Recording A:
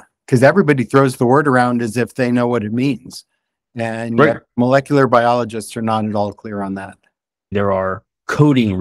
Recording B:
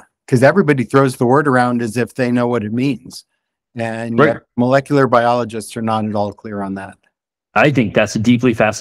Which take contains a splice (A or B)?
A